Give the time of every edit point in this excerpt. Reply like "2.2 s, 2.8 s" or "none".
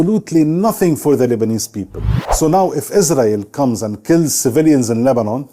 2.2 s